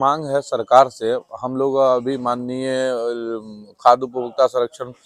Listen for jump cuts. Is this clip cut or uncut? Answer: uncut